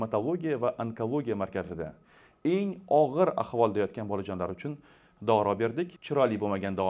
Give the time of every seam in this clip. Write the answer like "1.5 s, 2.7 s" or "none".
6.0 s